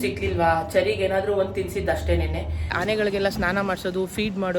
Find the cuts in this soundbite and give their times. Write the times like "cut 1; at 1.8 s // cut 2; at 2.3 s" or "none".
cut 1; at 2.8 s